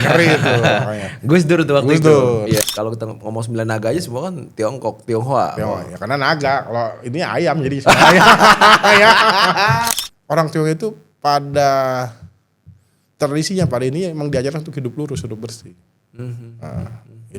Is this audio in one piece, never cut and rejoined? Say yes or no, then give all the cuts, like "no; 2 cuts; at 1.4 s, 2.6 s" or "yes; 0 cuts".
no; 2 cuts; at 2.6 s, 9.9 s